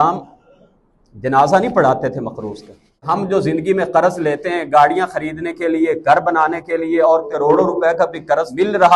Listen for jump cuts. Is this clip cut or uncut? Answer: cut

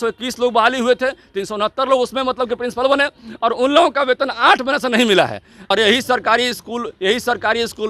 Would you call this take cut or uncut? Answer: cut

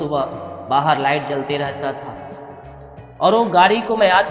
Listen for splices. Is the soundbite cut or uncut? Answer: uncut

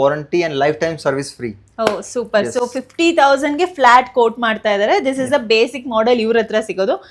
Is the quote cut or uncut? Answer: uncut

